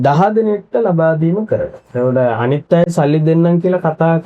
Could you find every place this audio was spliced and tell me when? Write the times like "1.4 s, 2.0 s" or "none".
1.8 s